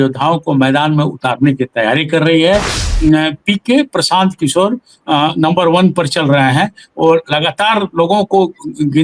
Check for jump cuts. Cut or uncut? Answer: cut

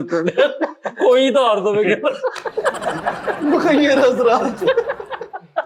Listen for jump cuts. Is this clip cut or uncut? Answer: uncut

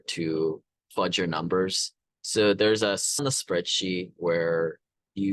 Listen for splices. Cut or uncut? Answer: cut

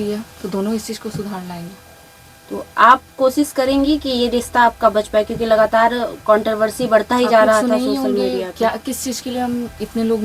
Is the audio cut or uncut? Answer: uncut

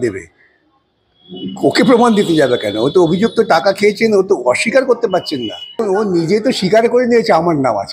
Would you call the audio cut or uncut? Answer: cut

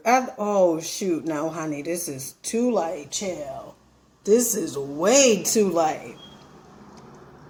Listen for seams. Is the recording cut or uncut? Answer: uncut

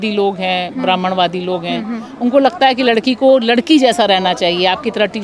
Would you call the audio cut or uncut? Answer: uncut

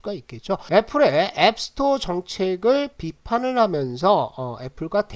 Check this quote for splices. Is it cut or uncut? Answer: uncut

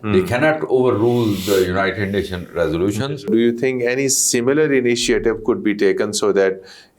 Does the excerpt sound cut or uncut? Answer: cut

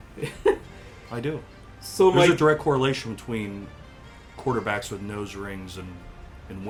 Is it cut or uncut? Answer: uncut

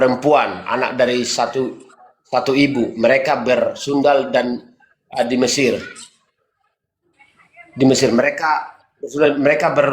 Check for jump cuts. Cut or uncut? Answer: uncut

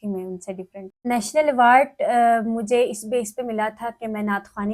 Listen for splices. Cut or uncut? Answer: cut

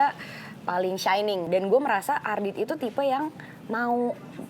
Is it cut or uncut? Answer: cut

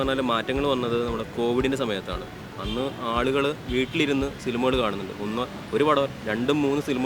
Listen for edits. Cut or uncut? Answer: uncut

